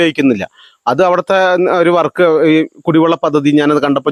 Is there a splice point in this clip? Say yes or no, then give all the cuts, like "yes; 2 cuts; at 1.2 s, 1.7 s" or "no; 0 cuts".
no; 0 cuts